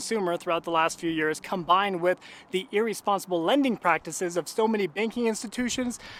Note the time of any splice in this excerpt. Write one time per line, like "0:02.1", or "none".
none